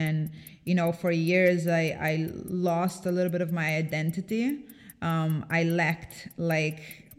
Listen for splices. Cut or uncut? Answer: uncut